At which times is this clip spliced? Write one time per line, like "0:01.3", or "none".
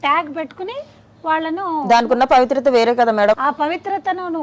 0:03.3